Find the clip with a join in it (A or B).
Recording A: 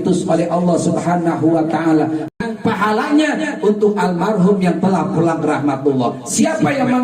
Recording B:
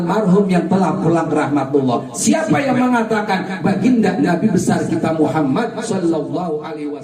A